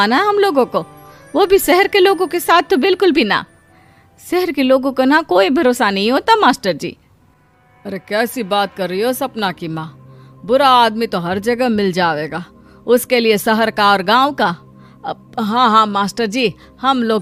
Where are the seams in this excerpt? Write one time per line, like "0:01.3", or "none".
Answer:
none